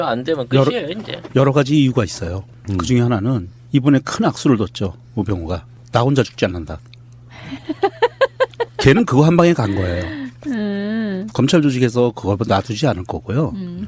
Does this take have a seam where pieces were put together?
no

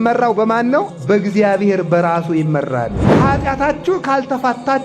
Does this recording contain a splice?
yes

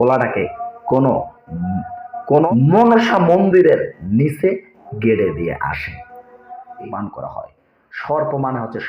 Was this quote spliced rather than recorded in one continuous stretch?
yes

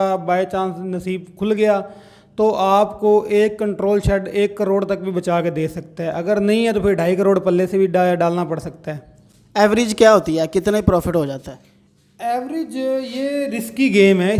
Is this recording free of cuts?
yes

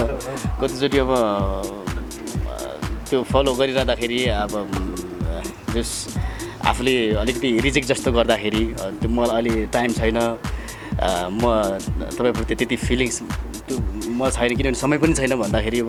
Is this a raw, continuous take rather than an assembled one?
yes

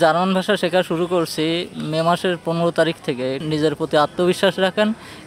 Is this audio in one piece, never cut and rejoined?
no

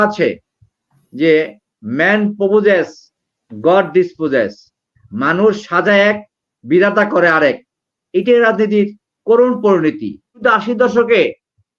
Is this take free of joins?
no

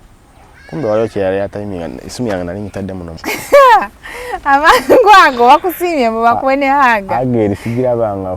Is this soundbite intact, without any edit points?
no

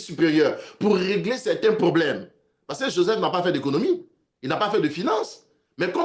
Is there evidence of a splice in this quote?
no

